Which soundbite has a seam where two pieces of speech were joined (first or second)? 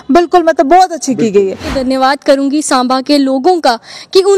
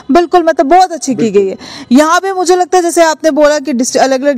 first